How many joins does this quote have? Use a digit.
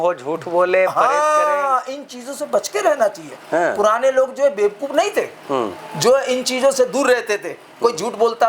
0